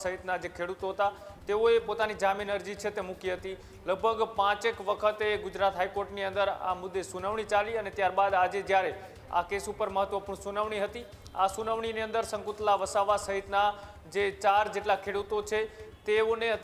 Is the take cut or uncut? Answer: uncut